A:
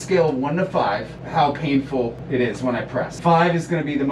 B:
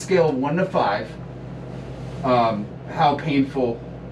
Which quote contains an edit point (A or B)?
A